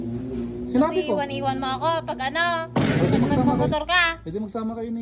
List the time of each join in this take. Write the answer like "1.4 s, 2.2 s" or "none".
2.8 s